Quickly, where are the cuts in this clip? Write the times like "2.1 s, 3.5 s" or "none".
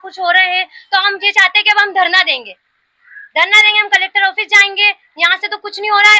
none